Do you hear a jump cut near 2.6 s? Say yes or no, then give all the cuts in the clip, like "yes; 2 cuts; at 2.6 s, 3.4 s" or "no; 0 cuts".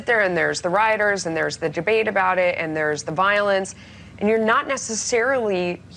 yes; 1 cut; at 2.6 s